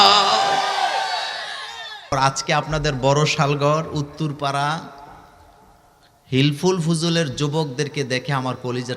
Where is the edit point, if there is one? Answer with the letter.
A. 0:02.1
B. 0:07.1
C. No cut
A